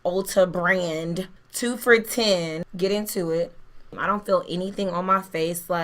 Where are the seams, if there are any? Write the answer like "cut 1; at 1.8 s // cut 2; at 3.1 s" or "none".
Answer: cut 1; at 4.0 s